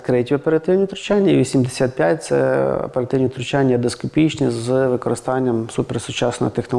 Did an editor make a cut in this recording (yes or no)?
no